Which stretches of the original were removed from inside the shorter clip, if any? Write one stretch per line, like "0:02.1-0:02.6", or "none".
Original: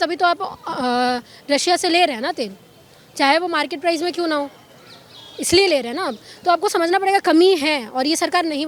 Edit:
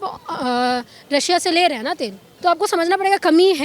0:02.6-0:06.3